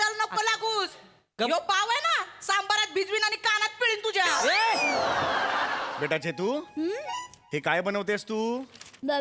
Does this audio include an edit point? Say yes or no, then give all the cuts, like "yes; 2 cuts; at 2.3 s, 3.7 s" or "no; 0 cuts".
yes; 1 cut; at 5.9 s